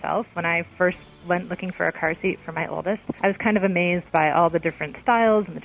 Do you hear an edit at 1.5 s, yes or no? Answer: no